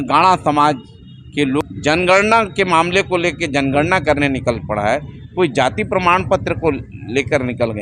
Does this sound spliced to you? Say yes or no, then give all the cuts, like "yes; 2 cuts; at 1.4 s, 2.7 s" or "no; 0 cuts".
yes; 1 cut; at 1.6 s